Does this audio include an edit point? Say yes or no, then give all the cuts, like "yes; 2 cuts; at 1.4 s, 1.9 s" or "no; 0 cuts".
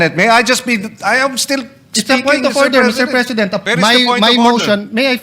yes; 1 cut; at 3.6 s